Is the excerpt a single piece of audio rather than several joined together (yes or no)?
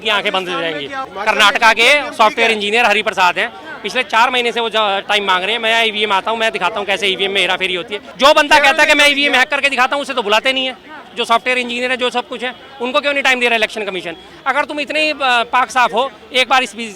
no